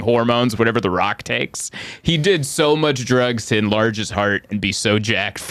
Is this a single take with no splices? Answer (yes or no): yes